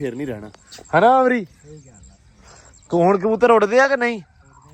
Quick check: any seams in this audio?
no; 0 cuts

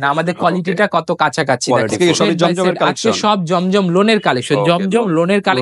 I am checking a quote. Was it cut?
yes; 1 cut; at 2.0 s

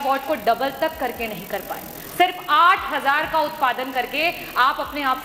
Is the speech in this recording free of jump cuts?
yes; 0 cuts

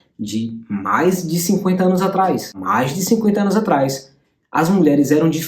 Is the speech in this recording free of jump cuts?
no; 1 cut; at 2.6 s

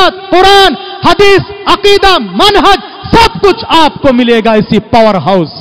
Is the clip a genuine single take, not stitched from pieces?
yes; 0 cuts

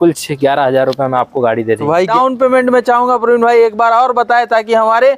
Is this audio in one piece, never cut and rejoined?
no; 1 cut; at 2.1 s

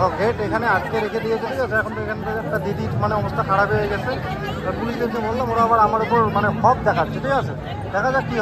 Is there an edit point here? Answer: no; 0 cuts

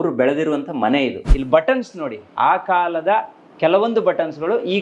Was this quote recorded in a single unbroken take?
no; 1 cut; at 1.3 s

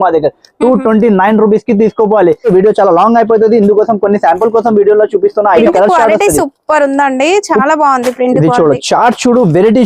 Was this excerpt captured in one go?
no; 2 cuts; at 2.4 s, 5.6 s

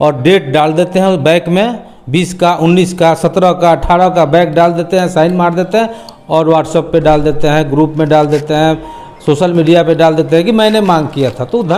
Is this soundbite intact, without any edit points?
yes; 0 cuts

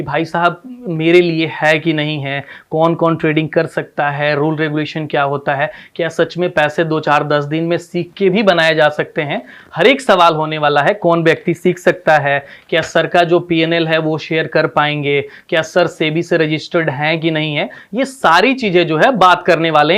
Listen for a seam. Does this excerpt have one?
no; 0 cuts

